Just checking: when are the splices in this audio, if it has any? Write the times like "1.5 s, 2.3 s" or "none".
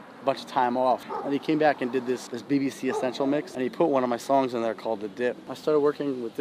1.1 s, 2.3 s, 3.5 s, 5.5 s

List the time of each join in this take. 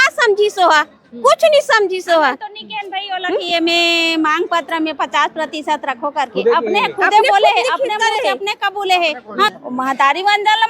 9.5 s

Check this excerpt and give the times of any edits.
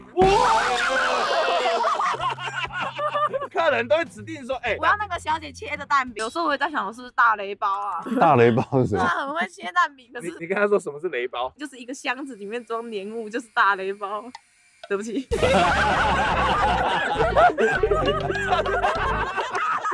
none

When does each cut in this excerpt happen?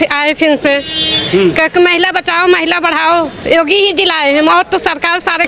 none

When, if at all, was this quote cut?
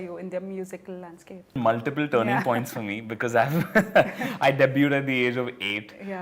1.6 s

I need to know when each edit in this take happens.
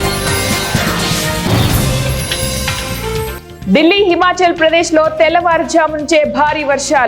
3.4 s

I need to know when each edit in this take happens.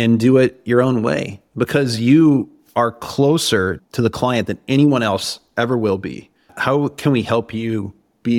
none

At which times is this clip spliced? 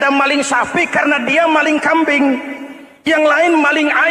none

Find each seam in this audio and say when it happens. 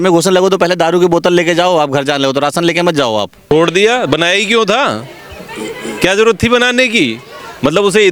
3.4 s

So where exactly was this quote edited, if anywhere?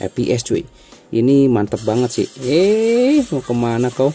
none

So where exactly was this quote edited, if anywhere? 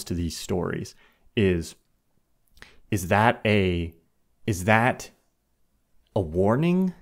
none

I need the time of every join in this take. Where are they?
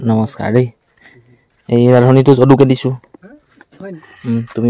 none

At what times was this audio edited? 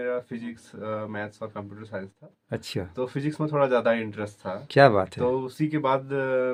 none

